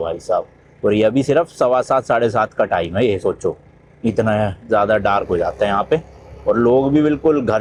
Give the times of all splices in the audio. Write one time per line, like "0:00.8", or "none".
none